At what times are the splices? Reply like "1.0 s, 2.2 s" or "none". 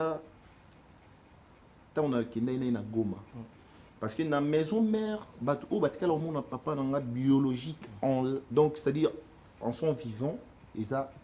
none